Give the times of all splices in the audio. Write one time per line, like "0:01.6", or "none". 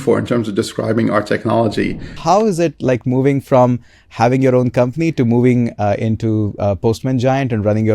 0:02.2